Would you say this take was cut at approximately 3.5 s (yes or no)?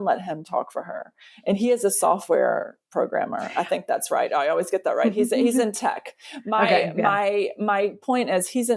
no